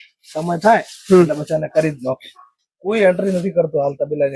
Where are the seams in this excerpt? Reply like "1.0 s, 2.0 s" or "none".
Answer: none